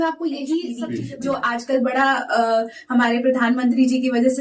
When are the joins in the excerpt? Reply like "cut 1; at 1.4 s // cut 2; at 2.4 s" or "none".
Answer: cut 1; at 0.9 s